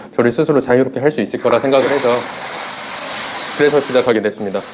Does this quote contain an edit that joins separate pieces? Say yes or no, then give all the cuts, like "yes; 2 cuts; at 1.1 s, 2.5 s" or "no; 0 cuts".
no; 0 cuts